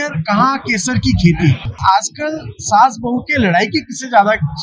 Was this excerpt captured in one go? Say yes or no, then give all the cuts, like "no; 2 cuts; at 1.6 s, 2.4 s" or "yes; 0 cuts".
no; 1 cut; at 1.7 s